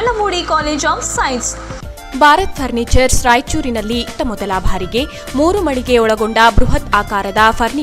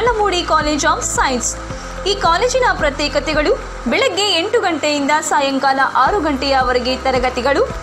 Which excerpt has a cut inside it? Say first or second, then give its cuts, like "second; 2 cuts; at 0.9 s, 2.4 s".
first; 1 cut; at 1.4 s